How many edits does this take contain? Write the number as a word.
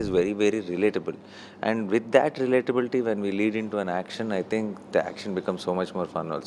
zero